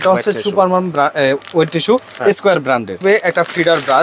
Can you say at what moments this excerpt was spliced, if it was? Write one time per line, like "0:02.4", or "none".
0:03.0